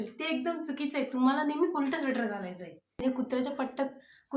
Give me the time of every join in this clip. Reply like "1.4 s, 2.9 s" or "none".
2.9 s